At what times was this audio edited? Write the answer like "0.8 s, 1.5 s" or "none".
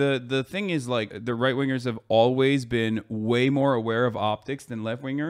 1.1 s